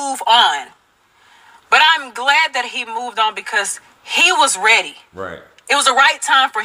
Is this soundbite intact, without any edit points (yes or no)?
yes